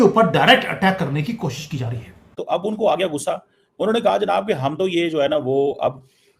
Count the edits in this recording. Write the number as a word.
one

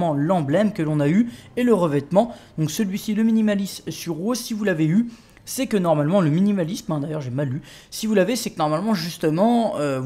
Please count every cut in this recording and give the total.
one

